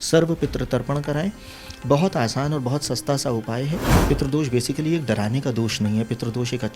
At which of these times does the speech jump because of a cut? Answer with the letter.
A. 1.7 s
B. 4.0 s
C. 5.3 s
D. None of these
B